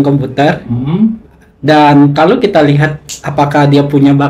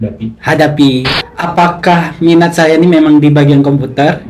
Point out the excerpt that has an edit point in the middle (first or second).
second